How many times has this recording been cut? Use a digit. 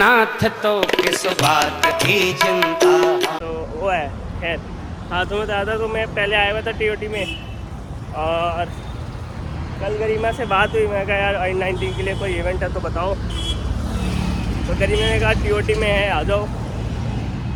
0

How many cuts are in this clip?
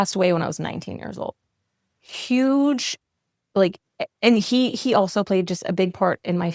0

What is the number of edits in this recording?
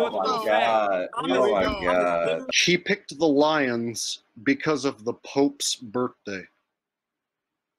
2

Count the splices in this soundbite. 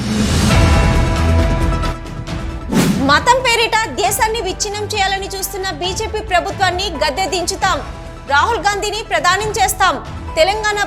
1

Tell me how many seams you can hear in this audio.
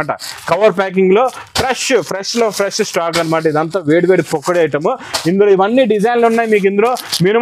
0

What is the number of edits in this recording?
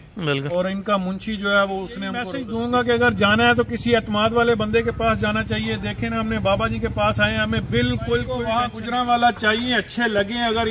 2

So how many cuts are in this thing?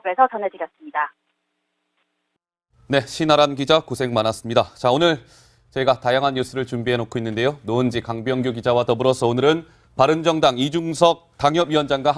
0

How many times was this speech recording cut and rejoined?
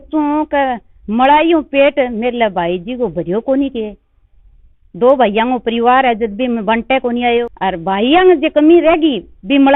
1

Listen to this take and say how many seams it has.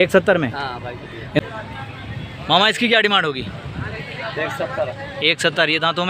1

